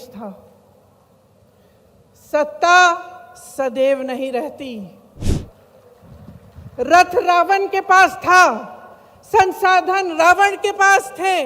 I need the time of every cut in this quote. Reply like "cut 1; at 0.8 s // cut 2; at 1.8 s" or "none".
cut 1; at 5.3 s